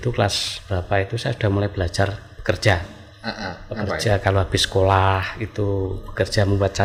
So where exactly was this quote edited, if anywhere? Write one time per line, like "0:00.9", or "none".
none